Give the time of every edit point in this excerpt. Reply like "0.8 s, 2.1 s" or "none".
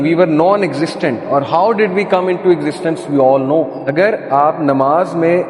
3.9 s